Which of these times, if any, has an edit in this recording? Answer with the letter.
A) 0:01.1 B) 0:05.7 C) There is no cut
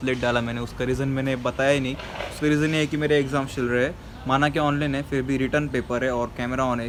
C